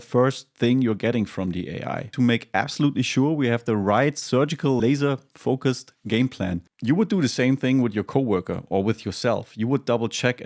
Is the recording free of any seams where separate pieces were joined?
no; 3 cuts; at 2.1 s, 4.8 s, 6.7 s

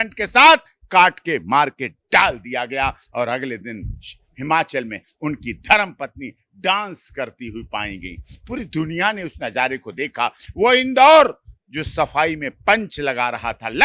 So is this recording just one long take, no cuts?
yes; 0 cuts

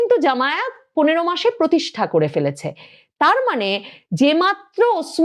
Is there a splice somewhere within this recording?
no; 0 cuts

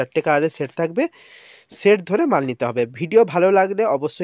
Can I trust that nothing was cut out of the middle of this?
yes; 0 cuts

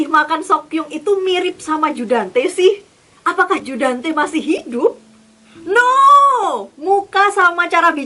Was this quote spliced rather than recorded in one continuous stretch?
no; 0 cuts

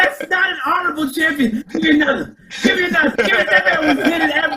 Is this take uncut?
no; 2 cuts; at 1.6 s, 3.1 s

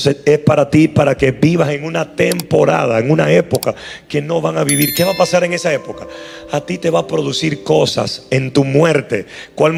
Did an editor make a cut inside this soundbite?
no; 0 cuts

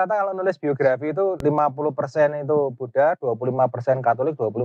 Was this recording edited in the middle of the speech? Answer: yes; 1 cut; at 1.4 s

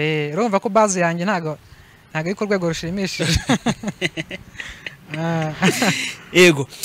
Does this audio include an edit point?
no; 0 cuts

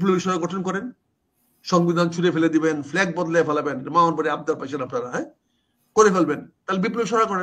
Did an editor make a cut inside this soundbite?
no; 0 cuts

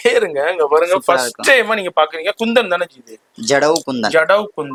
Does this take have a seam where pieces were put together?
no; 0 cuts

